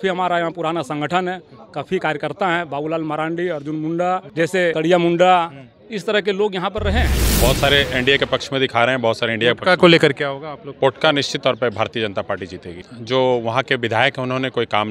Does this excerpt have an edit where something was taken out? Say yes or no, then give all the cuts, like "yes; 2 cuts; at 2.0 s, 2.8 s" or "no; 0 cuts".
yes; 3 cuts; at 4.3 s, 7.2 s, 12.8 s